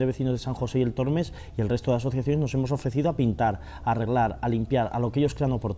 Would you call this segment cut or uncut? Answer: uncut